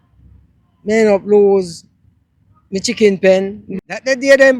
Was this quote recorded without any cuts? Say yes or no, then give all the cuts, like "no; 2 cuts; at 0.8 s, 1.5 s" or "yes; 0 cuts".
no; 1 cut; at 3.7 s